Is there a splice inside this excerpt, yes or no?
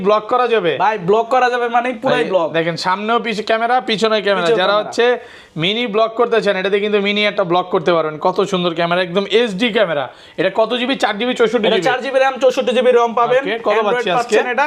no